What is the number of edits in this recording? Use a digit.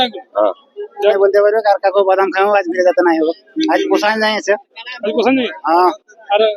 1